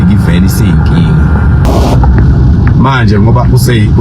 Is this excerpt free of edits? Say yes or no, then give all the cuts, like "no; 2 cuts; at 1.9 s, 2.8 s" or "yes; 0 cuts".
no; 1 cut; at 1.7 s